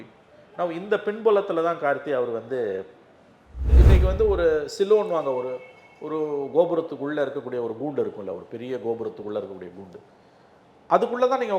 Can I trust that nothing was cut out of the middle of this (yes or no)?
no